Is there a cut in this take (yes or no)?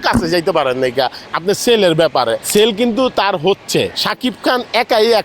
yes